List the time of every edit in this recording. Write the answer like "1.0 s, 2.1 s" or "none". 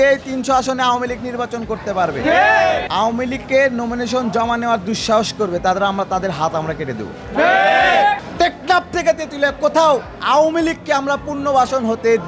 2.8 s, 8.3 s